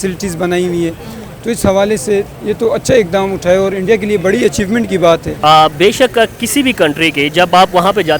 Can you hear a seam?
yes; 1 cut; at 5.3 s

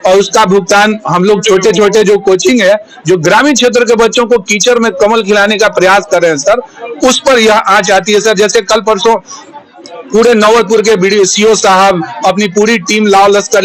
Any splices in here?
no; 0 cuts

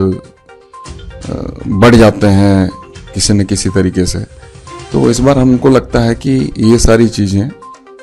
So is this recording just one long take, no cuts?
yes; 0 cuts

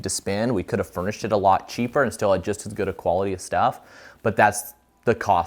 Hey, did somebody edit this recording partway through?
no; 0 cuts

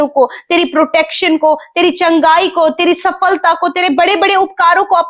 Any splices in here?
no; 0 cuts

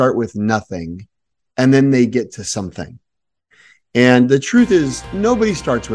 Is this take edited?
yes; 1 cut; at 5.0 s

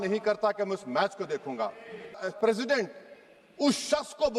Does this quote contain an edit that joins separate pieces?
yes; 1 cut; at 2.2 s

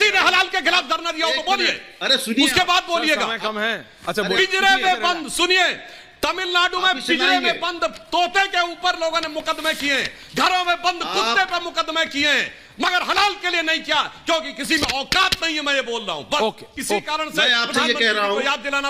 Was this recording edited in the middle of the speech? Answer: no; 0 cuts

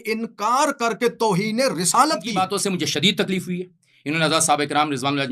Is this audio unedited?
no; 1 cut; at 2.5 s

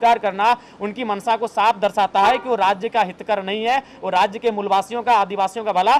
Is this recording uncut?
yes; 0 cuts

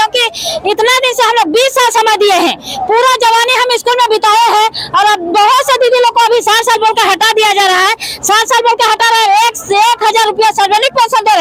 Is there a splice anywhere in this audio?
no; 0 cuts

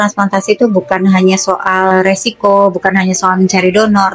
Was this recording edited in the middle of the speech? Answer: yes; 1 cut; at 1.9 s

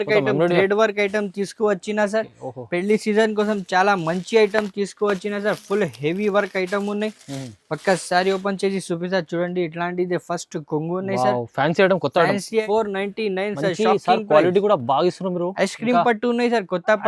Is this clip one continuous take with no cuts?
no; 1 cut; at 12.6 s

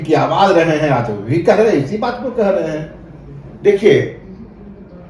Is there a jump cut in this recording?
no; 0 cuts

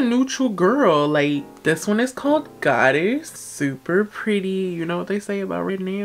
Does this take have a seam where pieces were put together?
no; 0 cuts

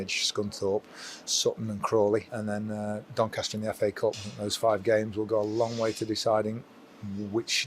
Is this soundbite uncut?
no; 2 cuts; at 2.3 s, 4.3 s

